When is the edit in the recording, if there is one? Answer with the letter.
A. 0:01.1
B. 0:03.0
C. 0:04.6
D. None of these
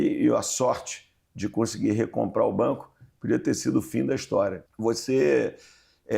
C